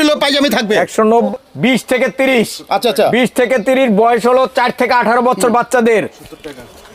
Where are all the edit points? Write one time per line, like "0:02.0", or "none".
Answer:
0:01.3